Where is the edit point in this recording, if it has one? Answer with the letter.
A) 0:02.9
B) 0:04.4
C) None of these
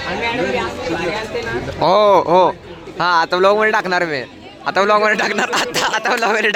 C